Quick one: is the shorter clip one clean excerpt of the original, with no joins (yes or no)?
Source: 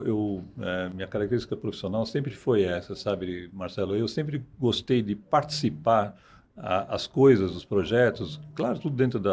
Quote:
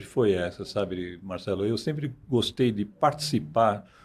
yes